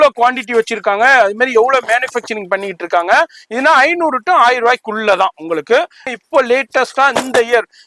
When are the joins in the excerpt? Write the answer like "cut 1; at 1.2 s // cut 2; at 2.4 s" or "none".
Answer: cut 1; at 6.1 s

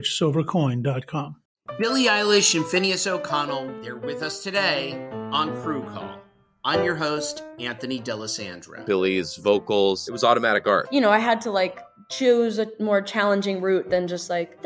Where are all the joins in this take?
cut 1; at 1.4 s

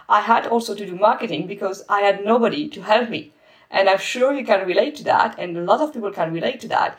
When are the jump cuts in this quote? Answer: none

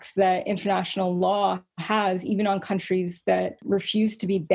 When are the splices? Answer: cut 1; at 3.6 s

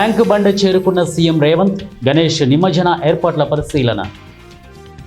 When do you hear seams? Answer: cut 1; at 4.1 s

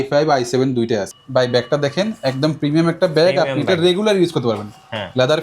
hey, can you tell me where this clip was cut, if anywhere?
cut 1; at 1.2 s

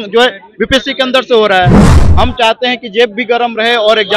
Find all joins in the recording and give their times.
cut 1; at 2.0 s

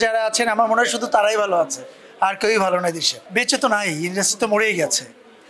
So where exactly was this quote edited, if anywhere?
cut 1; at 3.1 s

